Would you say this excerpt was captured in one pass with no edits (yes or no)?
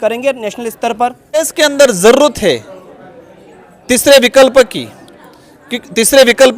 no